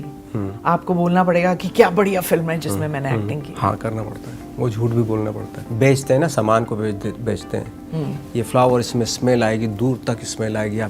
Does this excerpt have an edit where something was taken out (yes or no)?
yes